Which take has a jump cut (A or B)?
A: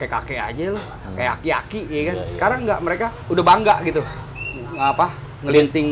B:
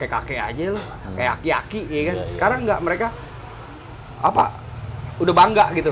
A